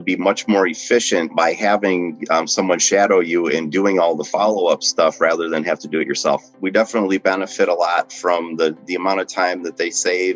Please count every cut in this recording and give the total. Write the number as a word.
two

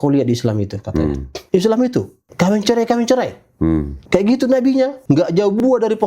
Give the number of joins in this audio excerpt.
four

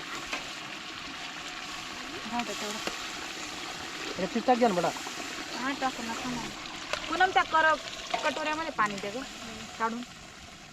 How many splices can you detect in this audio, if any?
one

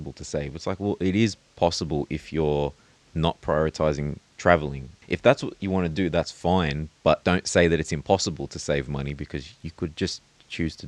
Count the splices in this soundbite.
two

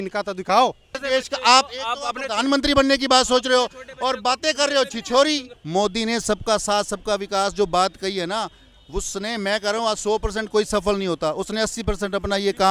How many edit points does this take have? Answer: two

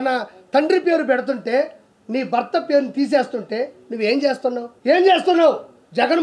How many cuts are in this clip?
one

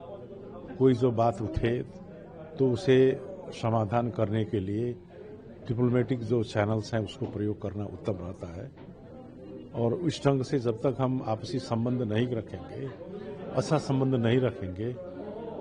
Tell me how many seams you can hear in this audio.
zero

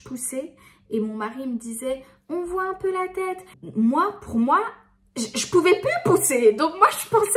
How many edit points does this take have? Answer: zero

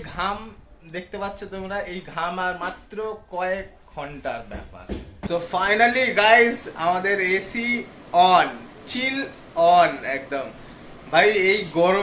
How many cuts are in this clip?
one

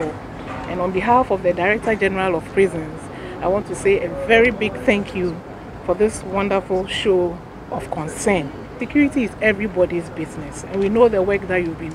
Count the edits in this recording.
one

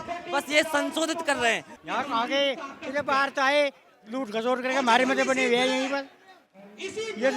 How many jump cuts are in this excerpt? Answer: one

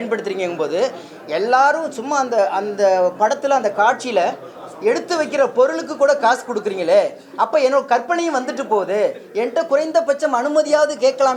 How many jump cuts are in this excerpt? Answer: zero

